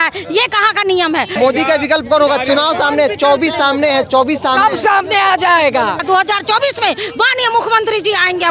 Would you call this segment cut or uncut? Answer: cut